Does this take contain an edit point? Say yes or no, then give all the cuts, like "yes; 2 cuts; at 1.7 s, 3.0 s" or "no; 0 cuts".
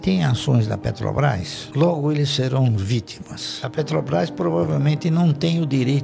no; 0 cuts